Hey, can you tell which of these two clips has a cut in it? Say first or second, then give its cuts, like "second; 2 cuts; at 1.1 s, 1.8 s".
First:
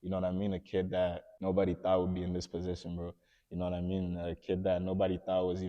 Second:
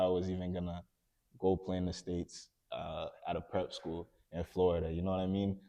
first; 1 cut; at 1.3 s